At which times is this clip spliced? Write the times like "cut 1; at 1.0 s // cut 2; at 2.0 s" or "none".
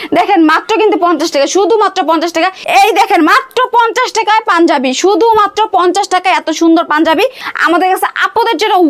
cut 1; at 2.6 s // cut 2; at 7.4 s